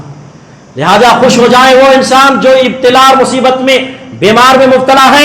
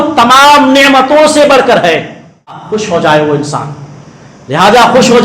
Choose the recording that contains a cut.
second; 1 cut; at 2.7 s

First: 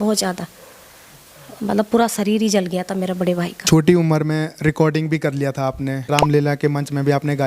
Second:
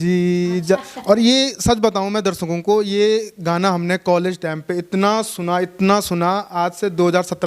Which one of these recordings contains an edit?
first; 2 cuts; at 3.6 s, 6.0 s

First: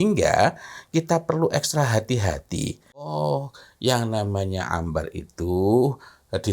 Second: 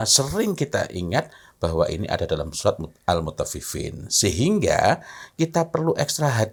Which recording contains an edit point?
first; 1 cut; at 3.2 s

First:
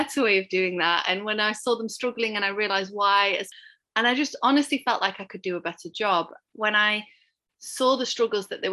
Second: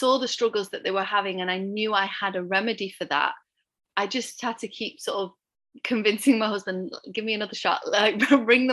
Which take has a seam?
first; 2 cuts; at 3.5 s, 6.4 s

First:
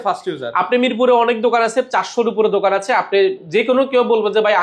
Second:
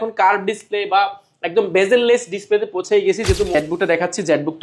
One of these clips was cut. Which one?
second; 1 cut; at 3.5 s

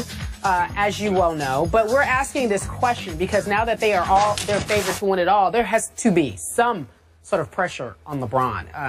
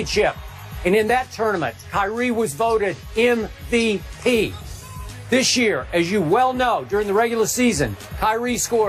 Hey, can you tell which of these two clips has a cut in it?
first; 1 cut; at 7.7 s

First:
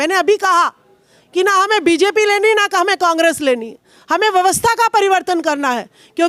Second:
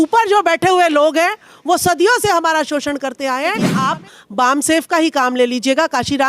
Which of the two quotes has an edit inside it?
second; 1 cut; at 3.8 s

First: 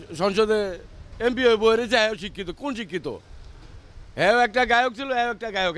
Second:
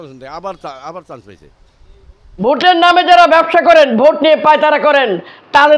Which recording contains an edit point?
second; 1 cut; at 2.4 s

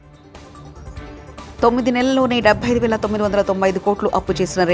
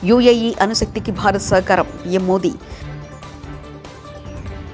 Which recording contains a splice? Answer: first; 1 cut; at 1.4 s

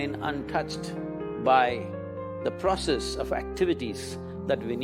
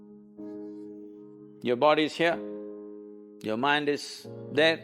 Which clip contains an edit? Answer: second; 1 cut; at 1.4 s

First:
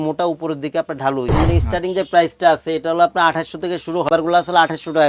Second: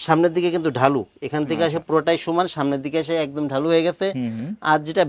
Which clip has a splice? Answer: first; 2 cuts; at 1.4 s, 4.1 s

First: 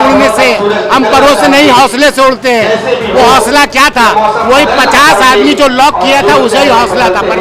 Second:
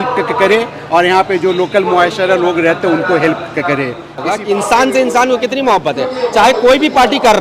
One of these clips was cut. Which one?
second; 1 cut; at 4.2 s

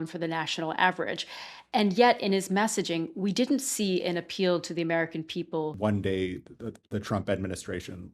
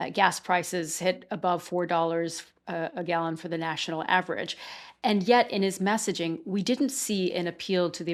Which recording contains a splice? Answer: first; 1 cut; at 5.8 s

